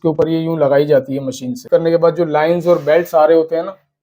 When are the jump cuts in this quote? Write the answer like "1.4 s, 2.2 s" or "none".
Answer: 1.7 s